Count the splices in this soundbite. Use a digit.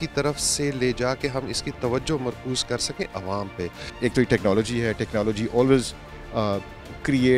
1